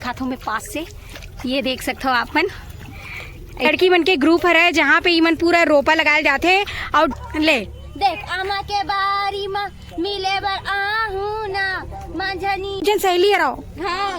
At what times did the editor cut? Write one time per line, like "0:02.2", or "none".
0:03.7
0:07.1
0:12.8

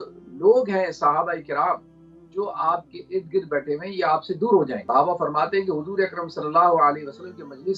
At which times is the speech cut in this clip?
0:04.8

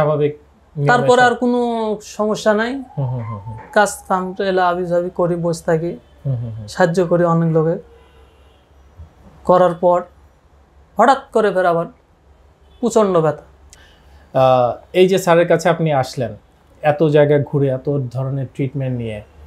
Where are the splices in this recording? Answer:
0:13.7

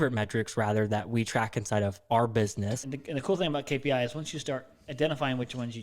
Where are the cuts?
0:02.8

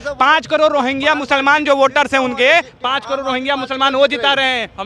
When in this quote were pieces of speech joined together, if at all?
none

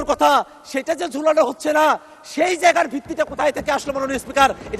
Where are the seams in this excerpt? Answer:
none

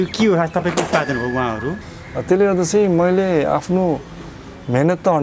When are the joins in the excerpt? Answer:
0:01.9

